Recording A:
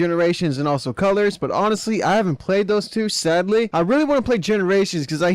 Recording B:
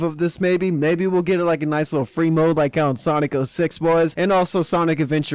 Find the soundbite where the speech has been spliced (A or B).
A